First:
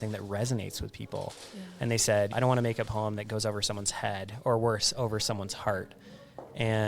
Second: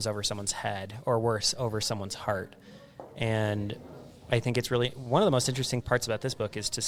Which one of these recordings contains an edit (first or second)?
first